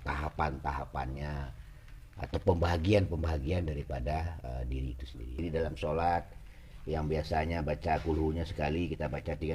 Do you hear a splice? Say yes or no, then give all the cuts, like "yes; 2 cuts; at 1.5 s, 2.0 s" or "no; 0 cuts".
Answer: yes; 1 cut; at 5.4 s